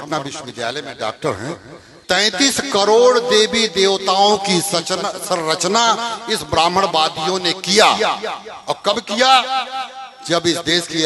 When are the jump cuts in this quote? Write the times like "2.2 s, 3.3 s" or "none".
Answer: 2.0 s